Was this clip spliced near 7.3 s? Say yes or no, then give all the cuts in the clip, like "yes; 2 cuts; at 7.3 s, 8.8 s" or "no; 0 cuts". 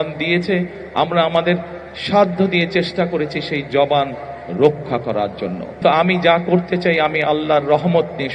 no; 1 cut; at 5.8 s